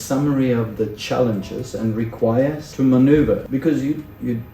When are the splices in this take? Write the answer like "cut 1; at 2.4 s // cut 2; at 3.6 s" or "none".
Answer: cut 1; at 2.6 s // cut 2; at 3.4 s